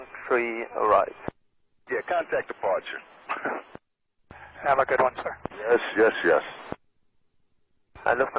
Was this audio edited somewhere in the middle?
no; 0 cuts

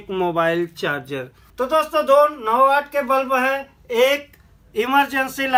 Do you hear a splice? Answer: no; 0 cuts

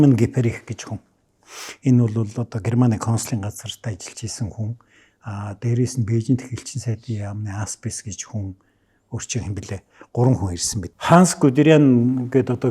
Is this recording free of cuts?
no; 1 cut; at 10.9 s

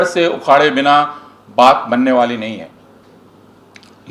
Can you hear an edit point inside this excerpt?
no; 0 cuts

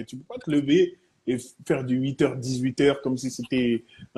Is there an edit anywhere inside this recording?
no; 0 cuts

